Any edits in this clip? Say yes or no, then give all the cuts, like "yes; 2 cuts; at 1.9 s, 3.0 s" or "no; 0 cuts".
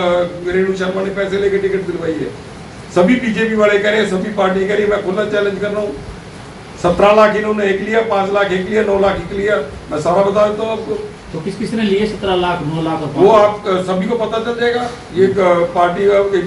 no; 0 cuts